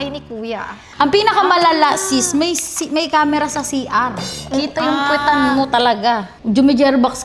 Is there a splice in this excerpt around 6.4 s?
yes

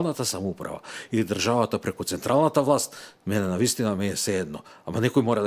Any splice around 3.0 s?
no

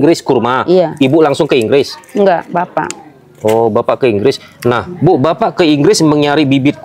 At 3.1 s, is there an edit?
no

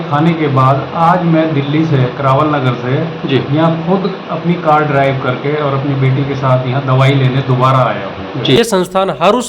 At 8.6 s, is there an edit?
yes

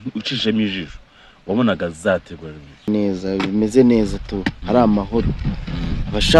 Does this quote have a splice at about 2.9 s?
yes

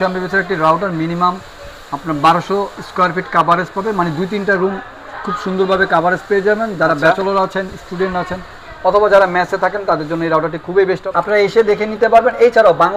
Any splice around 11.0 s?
yes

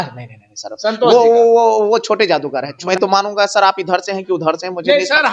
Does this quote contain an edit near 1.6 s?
no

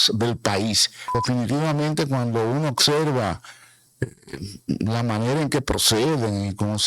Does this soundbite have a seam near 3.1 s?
no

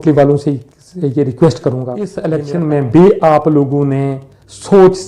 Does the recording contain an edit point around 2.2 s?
yes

